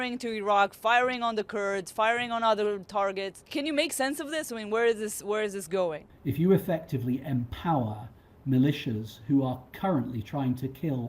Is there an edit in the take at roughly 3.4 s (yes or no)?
yes